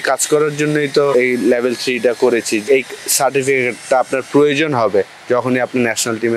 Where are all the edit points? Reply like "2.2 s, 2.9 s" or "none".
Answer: 1.1 s, 2.6 s